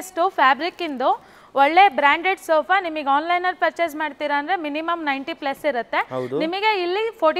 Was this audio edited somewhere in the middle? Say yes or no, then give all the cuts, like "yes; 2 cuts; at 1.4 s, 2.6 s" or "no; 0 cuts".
no; 0 cuts